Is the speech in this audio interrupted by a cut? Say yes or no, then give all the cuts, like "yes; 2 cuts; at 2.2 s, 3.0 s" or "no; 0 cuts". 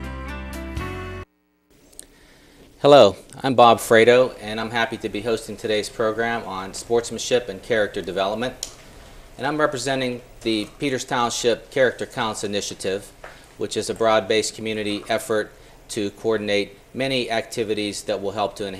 no; 0 cuts